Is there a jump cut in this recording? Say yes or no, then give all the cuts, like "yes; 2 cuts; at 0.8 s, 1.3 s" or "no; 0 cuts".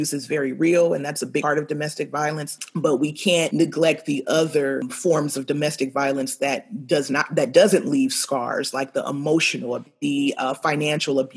yes; 5 cuts; at 1.4 s, 2.6 s, 3.5 s, 4.9 s, 9.9 s